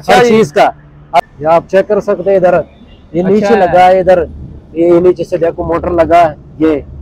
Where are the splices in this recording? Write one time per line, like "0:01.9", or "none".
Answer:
0:01.2